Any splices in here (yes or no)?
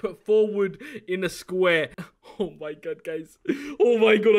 yes